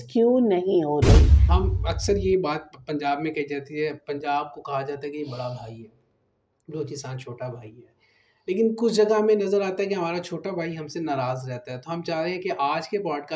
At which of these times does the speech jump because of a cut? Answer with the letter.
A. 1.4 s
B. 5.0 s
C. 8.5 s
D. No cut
A